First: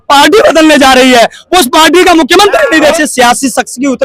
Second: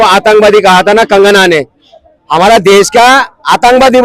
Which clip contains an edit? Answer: first; 1 cut; at 2.9 s

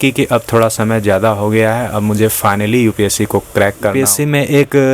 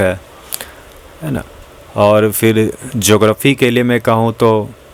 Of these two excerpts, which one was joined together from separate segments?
first; 1 cut; at 3.9 s

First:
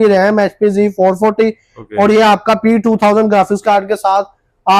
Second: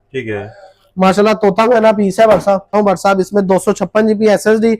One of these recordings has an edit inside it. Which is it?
second; 1 cut; at 2.7 s

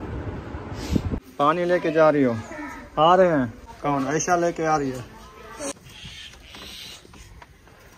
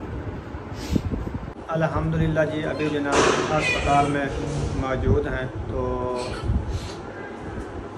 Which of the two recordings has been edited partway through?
first; 3 cuts; at 1.3 s, 3.6 s, 5.7 s

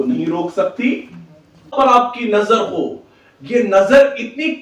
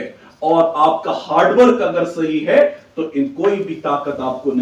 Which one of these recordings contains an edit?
first; 1 cut; at 1.7 s

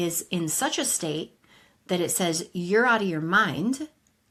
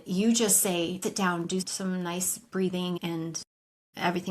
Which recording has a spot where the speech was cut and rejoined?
second; 2 cuts; at 1.5 s, 3.0 s

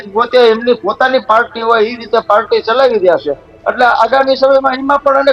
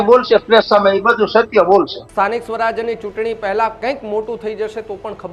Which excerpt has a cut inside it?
second; 1 cut; at 2.0 s

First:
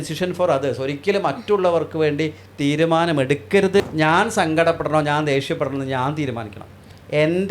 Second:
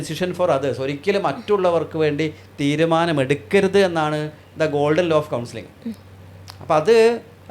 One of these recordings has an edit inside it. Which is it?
first; 1 cut; at 3.8 s

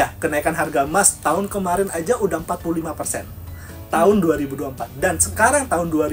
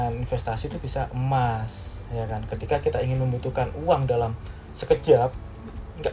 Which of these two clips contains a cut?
second; 1 cut; at 2.0 s

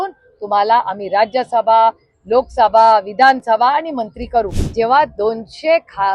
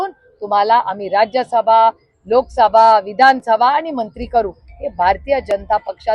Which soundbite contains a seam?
first; 1 cut; at 4.6 s

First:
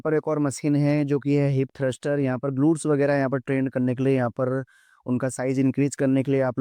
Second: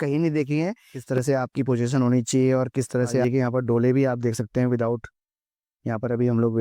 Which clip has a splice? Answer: second; 2 cuts; at 0.9 s, 3.2 s

